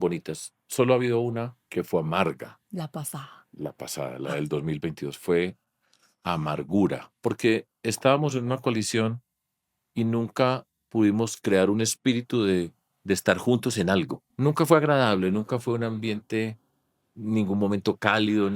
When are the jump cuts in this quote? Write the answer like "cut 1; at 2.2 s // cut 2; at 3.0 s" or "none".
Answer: cut 1; at 1.6 s // cut 2; at 2.6 s // cut 3; at 7.1 s // cut 4; at 14.3 s